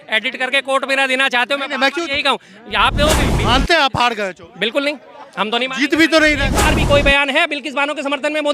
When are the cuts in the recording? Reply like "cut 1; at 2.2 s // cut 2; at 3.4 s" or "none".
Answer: cut 1; at 3.2 s // cut 2; at 6.5 s